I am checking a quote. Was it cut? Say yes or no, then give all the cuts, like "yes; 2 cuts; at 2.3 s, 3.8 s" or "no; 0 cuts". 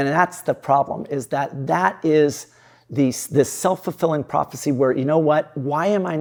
no; 0 cuts